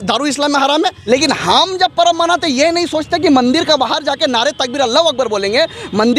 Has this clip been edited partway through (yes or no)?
yes